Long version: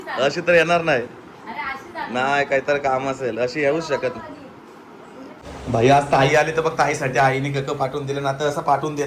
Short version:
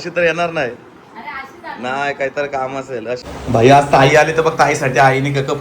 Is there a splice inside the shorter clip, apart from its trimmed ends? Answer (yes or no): yes